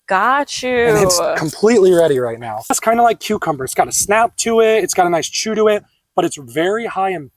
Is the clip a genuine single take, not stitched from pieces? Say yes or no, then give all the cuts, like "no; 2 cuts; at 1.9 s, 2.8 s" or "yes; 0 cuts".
no; 1 cut; at 2.8 s